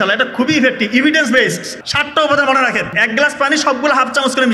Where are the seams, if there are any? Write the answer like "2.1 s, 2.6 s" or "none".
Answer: 1.7 s, 3.0 s